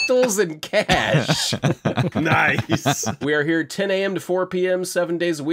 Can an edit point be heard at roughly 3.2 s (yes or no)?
yes